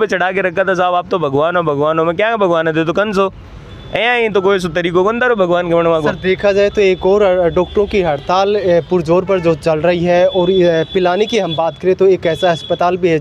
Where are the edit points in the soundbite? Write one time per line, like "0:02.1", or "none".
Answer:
none